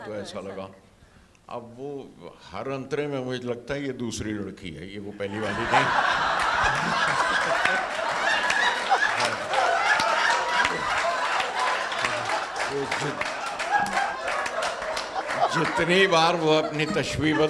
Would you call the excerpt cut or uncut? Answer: uncut